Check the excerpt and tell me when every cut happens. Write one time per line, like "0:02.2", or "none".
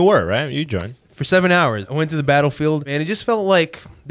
0:01.8
0:02.9

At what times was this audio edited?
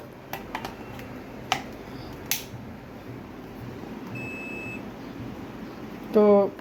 none

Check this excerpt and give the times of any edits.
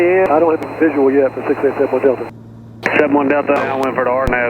0:03.6

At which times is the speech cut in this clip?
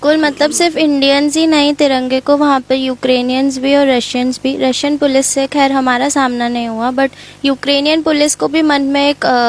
none

